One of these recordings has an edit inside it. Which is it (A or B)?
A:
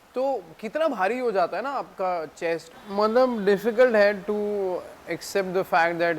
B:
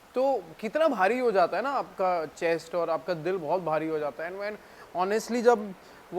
A